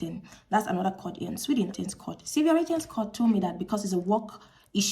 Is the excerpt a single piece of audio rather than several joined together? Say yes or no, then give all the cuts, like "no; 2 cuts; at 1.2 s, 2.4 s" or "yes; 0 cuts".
no; 1 cut; at 1.8 s